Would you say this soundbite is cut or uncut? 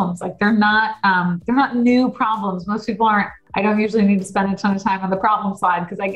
cut